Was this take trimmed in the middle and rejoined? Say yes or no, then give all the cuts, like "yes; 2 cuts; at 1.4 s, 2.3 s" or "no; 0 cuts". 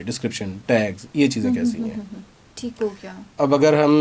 no; 0 cuts